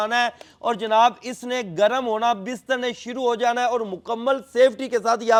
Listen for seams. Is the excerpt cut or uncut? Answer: uncut